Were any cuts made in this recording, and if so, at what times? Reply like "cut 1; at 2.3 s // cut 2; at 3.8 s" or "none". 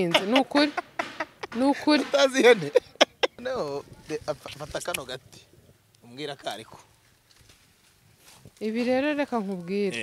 cut 1; at 3.4 s